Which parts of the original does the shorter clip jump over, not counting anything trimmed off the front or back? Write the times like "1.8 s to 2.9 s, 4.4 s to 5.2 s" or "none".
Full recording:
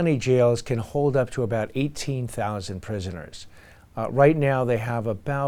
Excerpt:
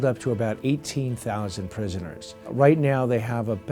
3.6 s to 4.1 s